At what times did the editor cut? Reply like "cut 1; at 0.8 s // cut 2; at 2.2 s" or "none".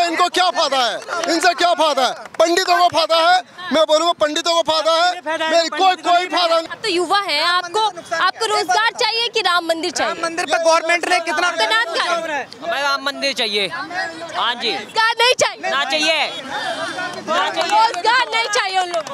none